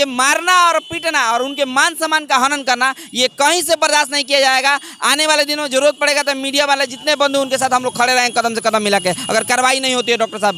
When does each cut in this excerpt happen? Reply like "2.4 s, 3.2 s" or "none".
none